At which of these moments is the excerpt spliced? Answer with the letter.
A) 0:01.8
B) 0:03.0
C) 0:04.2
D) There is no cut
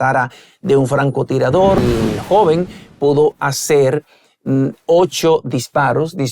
A